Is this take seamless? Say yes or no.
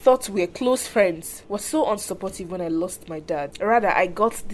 no